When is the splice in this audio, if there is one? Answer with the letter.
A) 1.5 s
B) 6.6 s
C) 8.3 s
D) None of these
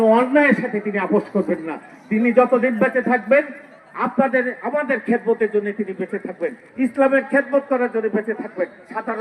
D